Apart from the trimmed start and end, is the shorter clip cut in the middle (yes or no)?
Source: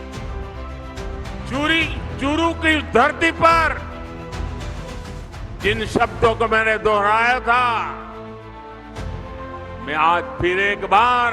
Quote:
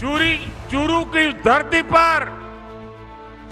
yes